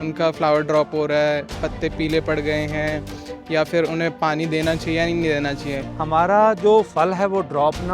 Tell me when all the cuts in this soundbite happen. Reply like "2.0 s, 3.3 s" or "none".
5.8 s